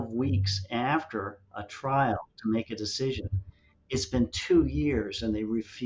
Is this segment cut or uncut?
uncut